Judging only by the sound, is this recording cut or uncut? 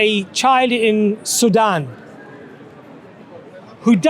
uncut